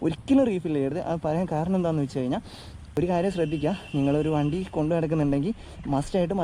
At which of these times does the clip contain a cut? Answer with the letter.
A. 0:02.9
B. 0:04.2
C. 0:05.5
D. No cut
A